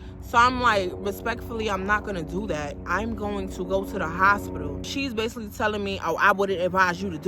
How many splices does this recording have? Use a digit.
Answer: 1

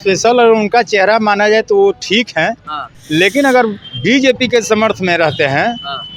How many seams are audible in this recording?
0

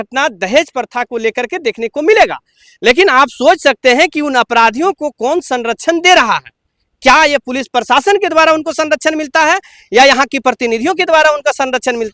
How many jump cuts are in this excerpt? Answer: 0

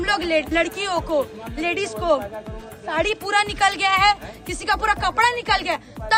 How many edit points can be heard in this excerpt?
0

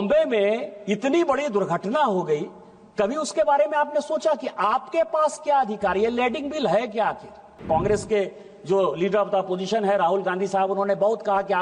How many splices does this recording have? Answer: 1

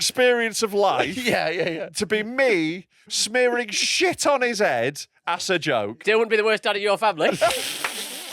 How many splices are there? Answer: 1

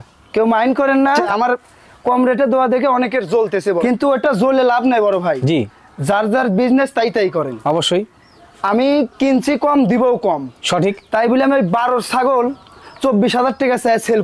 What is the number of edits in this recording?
2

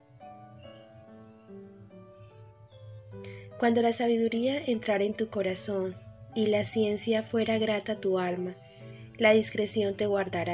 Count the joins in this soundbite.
1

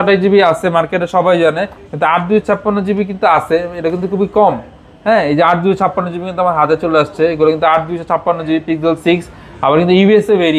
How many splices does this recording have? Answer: 0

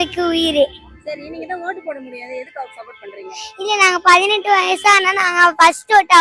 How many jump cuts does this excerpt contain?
0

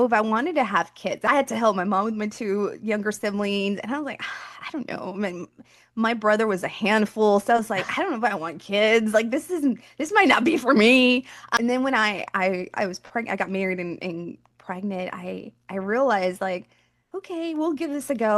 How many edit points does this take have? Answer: 1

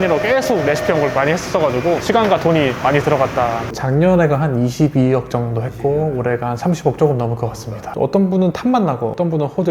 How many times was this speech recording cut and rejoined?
2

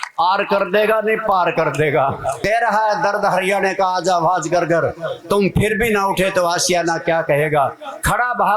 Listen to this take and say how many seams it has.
1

